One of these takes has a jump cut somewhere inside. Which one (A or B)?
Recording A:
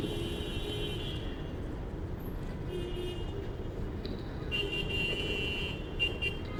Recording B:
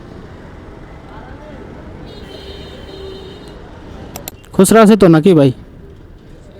B